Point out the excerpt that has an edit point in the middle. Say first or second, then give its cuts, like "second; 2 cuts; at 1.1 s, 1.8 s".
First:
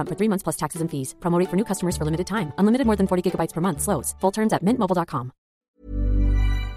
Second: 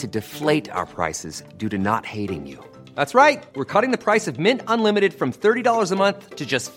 first; 1 cut; at 5.7 s